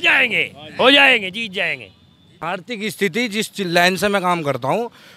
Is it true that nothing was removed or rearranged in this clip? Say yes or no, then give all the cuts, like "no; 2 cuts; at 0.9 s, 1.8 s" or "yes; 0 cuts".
no; 1 cut; at 2.2 s